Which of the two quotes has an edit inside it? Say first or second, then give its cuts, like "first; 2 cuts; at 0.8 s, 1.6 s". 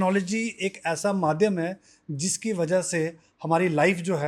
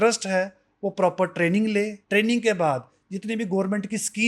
second; 1 cut; at 2.0 s